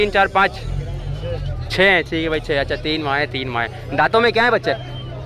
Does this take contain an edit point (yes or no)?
no